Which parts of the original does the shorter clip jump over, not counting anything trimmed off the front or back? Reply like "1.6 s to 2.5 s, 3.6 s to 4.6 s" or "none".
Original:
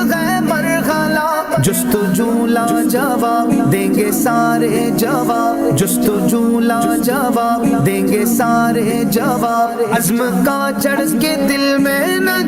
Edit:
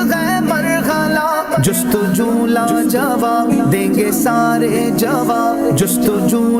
none